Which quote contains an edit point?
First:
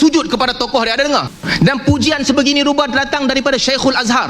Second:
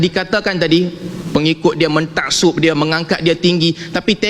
first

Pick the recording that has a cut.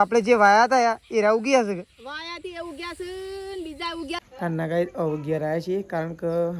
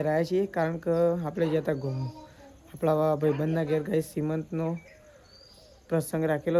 first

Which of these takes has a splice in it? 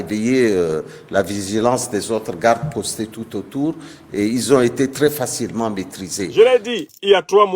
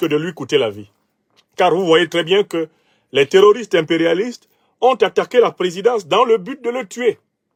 first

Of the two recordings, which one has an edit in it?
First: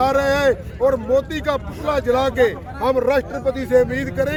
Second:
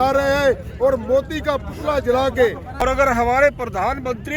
second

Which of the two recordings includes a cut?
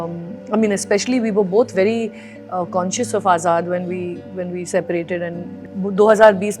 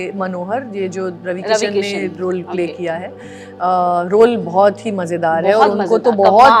first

